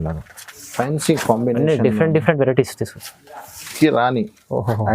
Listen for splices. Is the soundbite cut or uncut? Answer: cut